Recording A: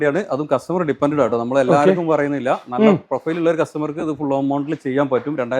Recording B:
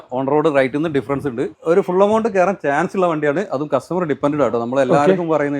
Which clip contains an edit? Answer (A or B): B